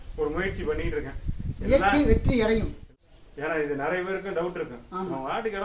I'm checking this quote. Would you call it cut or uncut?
cut